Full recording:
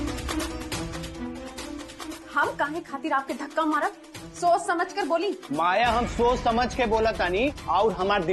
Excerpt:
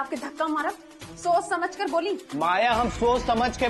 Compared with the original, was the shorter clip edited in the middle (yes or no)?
no